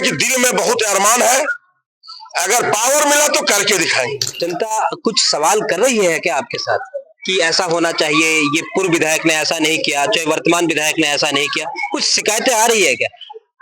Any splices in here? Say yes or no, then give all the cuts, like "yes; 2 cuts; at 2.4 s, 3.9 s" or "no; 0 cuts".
yes; 1 cut; at 4.3 s